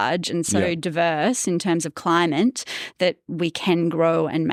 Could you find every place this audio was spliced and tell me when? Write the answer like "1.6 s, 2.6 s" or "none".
none